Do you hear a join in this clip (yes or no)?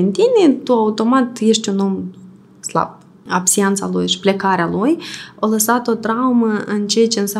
yes